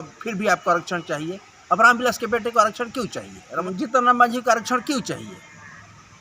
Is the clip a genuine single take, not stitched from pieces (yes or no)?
no